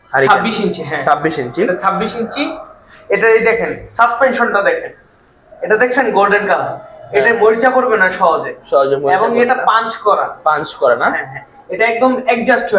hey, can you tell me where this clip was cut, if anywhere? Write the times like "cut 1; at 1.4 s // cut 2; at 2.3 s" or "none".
none